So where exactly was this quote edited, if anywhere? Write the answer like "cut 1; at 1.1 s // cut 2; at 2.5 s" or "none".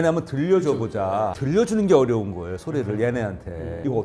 cut 1; at 1.3 s